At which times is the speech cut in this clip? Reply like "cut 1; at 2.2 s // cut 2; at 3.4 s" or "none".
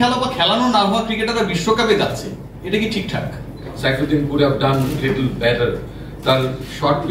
cut 1; at 3.7 s